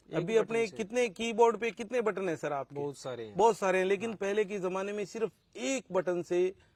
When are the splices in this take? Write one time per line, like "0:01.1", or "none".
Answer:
none